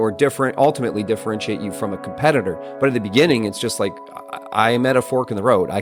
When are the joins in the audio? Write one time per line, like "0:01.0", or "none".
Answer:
none